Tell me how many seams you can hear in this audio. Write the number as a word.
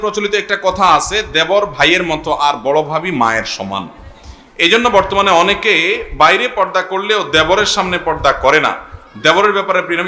zero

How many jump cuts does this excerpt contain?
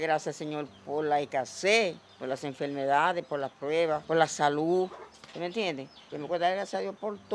zero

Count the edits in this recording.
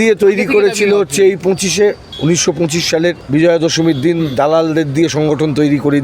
two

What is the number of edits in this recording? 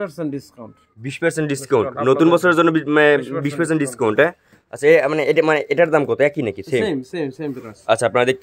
zero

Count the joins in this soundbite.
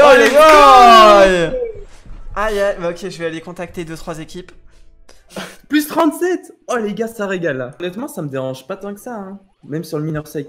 zero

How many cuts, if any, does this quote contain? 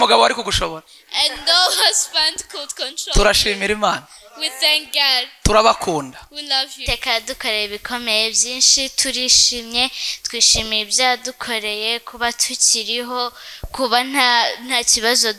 one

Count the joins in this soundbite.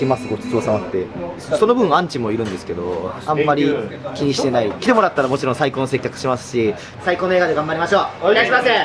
three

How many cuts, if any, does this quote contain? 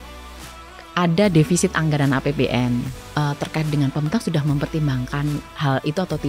one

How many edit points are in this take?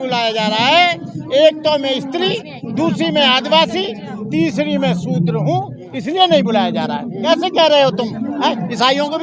one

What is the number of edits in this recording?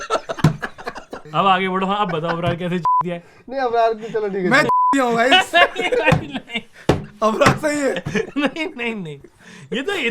zero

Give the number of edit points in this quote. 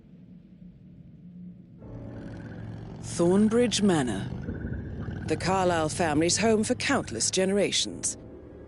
one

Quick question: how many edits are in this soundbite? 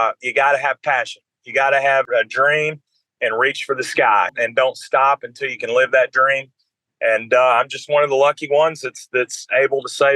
two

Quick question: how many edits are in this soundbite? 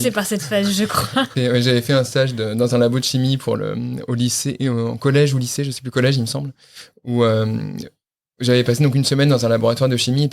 one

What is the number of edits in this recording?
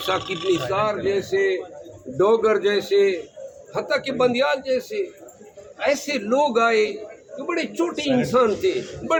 zero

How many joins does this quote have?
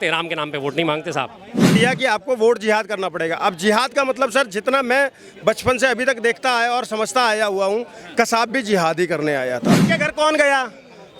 two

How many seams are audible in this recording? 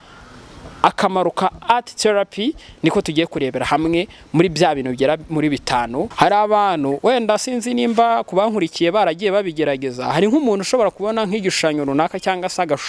one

